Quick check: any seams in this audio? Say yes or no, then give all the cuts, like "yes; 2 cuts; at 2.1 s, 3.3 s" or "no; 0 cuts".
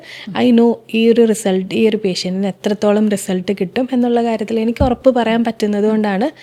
no; 0 cuts